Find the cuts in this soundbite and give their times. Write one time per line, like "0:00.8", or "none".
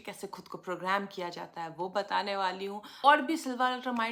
none